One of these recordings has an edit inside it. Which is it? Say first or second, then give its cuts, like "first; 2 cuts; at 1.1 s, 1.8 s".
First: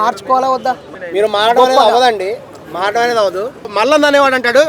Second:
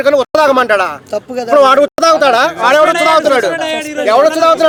first; 2 cuts; at 0.9 s, 3.7 s